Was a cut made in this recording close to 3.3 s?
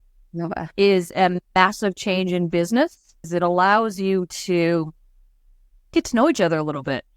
yes; 1 cut; at 3.3 s

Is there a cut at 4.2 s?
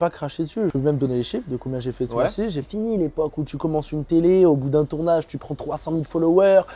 no; 2 cuts; at 0.7 s, 2.6 s

